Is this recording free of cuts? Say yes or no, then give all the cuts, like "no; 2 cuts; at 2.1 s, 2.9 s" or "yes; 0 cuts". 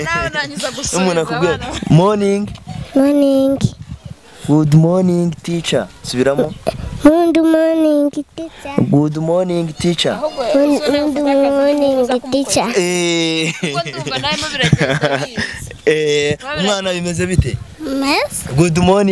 yes; 0 cuts